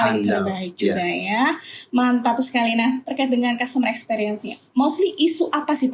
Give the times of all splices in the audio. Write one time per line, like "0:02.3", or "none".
none